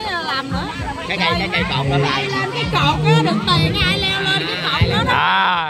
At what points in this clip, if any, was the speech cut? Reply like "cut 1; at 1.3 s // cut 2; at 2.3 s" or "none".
none